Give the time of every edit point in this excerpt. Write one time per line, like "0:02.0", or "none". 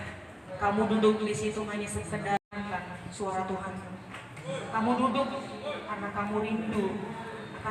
0:02.5